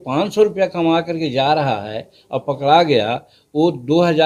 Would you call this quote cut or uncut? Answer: uncut